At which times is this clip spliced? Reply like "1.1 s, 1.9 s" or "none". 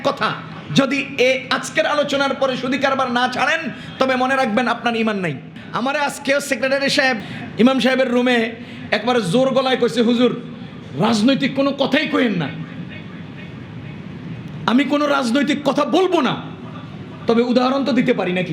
5.5 s, 7.2 s